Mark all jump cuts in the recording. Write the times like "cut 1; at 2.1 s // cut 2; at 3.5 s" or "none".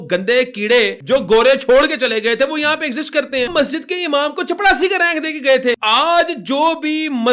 cut 1; at 1.0 s // cut 2; at 3.5 s // cut 3; at 5.8 s